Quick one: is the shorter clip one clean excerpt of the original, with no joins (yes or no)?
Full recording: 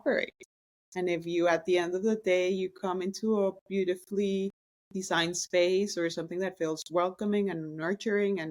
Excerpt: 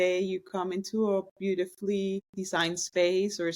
no